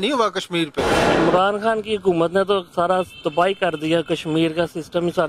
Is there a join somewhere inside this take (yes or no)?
yes